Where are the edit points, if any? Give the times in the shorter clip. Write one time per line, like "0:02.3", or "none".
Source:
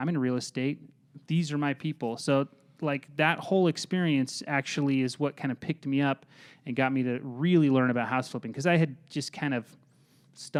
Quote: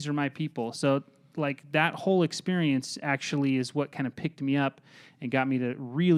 none

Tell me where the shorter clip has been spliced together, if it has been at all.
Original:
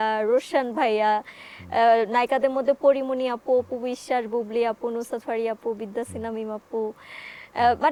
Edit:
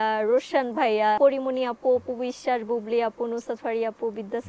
0:01.2

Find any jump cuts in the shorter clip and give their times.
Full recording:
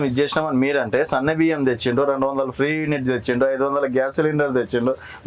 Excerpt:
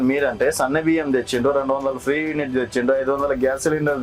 none

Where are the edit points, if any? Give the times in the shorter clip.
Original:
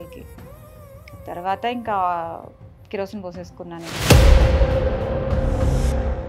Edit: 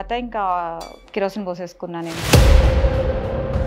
0:01.0

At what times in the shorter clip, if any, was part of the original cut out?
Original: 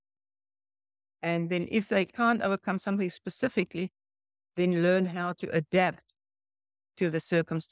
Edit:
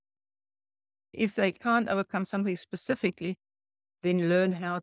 0:01.1

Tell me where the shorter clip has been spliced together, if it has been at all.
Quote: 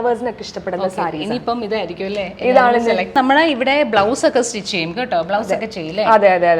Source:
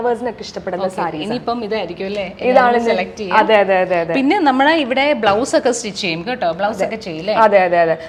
0:03.1

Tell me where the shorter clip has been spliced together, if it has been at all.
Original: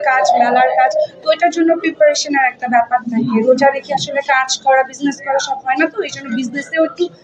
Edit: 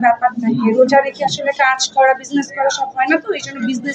none

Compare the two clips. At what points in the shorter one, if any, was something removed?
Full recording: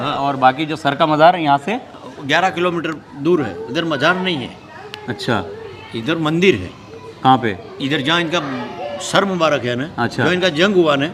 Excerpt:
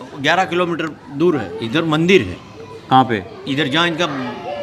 0:01.5

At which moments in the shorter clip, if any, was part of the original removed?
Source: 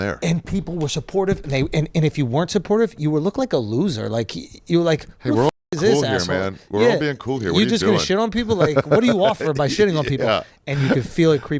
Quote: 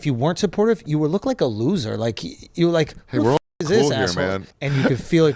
0:04.5

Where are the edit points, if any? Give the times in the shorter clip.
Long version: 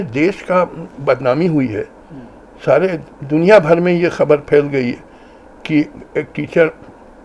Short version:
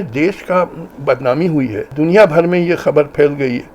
0:01.8

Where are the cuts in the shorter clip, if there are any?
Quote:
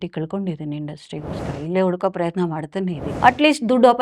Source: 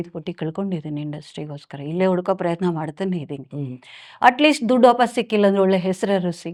0:03.1

